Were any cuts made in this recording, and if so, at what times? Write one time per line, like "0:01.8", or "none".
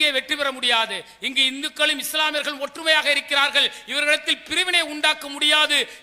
none